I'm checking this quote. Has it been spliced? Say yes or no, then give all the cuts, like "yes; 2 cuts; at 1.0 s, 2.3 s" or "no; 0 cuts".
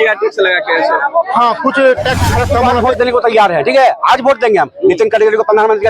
yes; 1 cut; at 2.8 s